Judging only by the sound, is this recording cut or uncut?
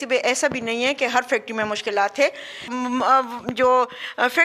cut